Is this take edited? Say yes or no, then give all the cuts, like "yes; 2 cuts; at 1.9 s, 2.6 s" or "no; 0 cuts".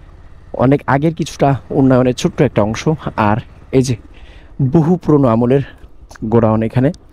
no; 0 cuts